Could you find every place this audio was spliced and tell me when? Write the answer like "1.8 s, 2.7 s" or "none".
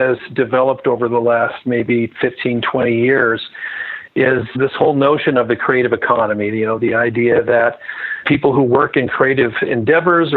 4.5 s, 8.2 s

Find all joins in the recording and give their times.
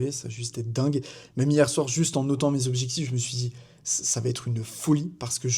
none

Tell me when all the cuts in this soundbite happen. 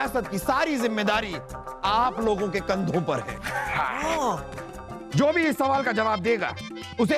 1.8 s, 4.9 s

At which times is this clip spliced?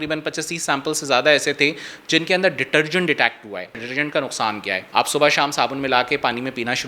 3.8 s

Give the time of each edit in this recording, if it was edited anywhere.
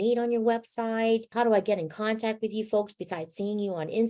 1.3 s

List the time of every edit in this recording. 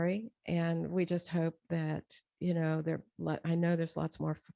none

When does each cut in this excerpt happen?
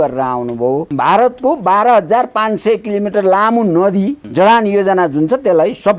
0.9 s, 4.2 s

